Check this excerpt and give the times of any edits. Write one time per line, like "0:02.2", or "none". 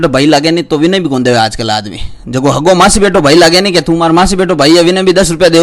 none